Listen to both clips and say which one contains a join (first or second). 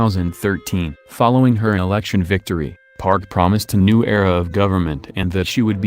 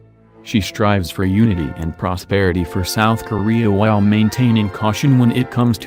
first